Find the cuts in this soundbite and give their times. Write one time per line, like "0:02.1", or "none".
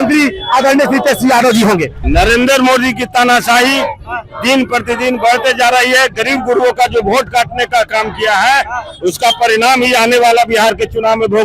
0:02.0